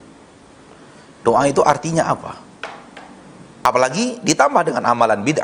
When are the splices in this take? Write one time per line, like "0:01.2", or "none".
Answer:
0:03.6